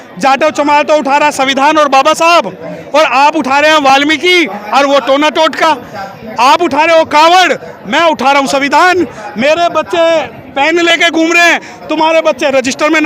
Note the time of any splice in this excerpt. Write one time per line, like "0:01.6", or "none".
none